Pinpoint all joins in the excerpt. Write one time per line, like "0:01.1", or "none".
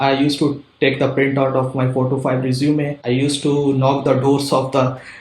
0:03.0